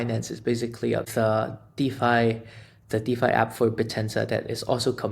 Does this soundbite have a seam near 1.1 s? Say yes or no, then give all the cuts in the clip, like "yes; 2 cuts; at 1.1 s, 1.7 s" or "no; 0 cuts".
yes; 1 cut; at 1.1 s